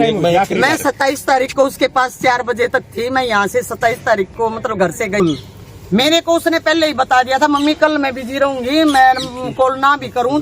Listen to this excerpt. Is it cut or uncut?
cut